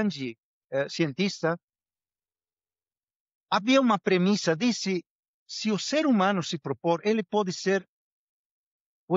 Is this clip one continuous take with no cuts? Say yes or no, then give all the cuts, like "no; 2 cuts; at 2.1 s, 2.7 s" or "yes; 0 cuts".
yes; 0 cuts